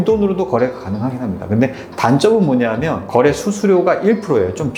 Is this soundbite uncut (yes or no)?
yes